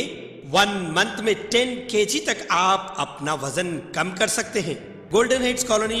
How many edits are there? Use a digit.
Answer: 1